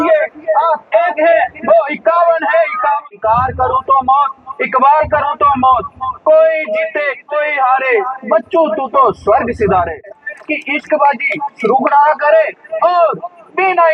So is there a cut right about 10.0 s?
yes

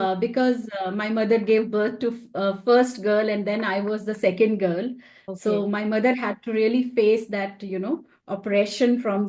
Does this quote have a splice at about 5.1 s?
no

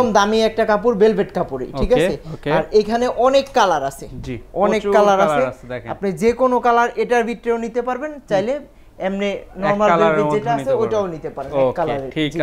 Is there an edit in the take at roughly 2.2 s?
no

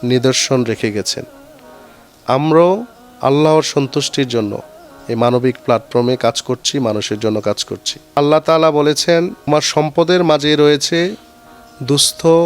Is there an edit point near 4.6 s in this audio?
no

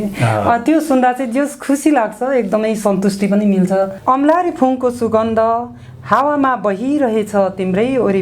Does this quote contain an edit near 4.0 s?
yes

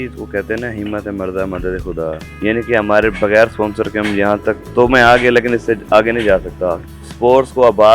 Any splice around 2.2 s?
yes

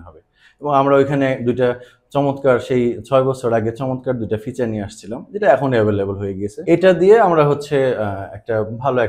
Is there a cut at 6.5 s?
yes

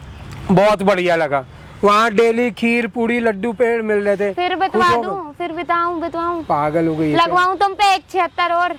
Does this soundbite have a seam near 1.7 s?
no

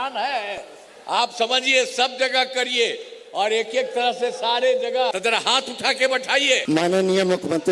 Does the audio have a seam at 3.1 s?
no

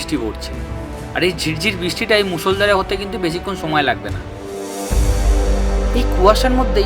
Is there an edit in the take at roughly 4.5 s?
yes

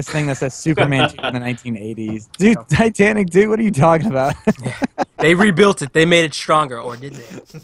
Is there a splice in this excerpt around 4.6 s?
no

